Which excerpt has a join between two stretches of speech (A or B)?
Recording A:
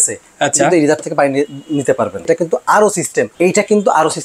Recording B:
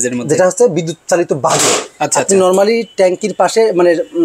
A